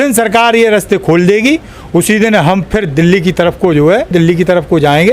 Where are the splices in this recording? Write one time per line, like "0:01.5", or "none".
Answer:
0:04.1

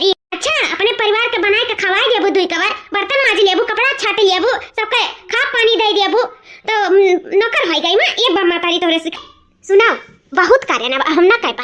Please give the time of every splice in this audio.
0:09.2

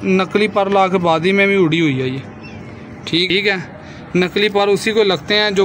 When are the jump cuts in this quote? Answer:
0:03.3

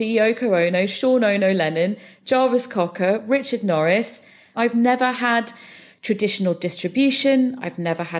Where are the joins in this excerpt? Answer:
0:04.5

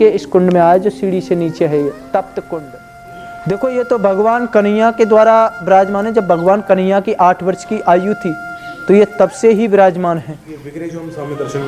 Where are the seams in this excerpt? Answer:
0:03.1

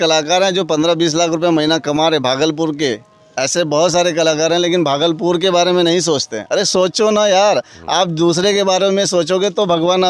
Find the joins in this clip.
none

